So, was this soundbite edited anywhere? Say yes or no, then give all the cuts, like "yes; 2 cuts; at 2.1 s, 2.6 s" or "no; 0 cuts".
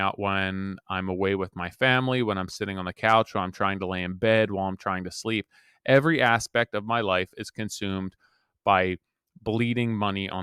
no; 0 cuts